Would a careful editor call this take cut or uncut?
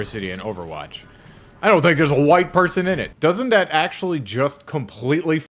cut